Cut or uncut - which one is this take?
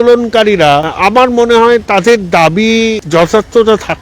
cut